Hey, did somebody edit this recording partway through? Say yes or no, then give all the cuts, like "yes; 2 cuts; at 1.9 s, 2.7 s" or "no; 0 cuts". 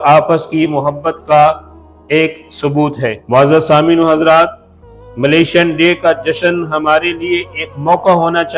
yes; 1 cut; at 3.2 s